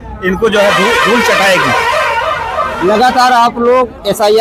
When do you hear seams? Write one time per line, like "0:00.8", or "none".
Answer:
none